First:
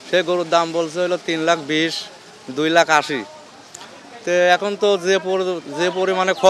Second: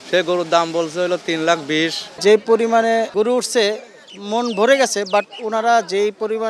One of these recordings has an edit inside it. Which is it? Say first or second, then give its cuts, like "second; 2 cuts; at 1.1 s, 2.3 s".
second; 2 cuts; at 2.1 s, 3.1 s